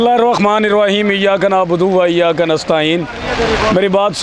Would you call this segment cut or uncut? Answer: uncut